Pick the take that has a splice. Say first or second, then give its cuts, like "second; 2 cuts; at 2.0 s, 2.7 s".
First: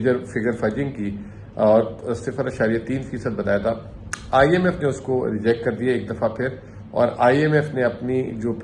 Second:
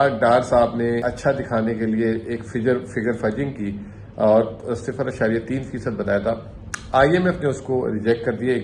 second; 1 cut; at 1.0 s